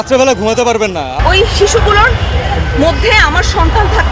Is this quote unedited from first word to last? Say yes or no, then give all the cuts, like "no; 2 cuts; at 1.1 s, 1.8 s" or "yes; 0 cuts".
no; 1 cut; at 1.2 s